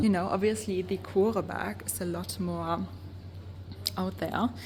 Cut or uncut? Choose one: uncut